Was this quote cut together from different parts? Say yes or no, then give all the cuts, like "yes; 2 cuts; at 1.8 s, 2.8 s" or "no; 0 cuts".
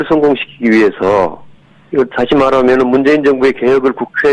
no; 0 cuts